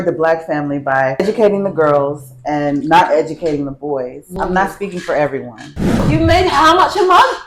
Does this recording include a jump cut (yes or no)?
yes